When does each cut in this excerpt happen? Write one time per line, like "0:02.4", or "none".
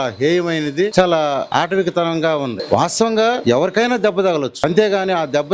0:00.9
0:01.4
0:02.6
0:03.4
0:04.5